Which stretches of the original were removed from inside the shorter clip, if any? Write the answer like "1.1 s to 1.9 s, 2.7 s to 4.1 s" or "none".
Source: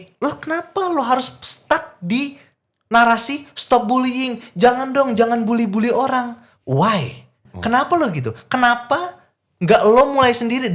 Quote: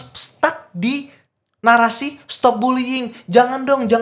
none

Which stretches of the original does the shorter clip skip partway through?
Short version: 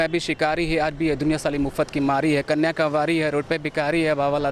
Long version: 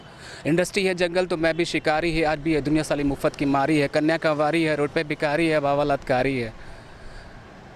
none

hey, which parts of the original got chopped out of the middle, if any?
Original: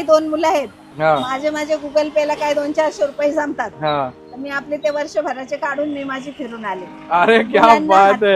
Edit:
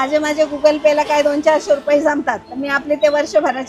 3.7 s to 4.2 s

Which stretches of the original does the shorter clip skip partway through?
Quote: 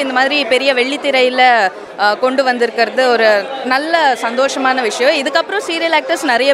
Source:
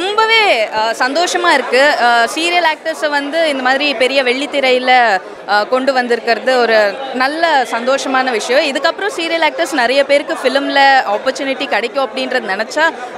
none

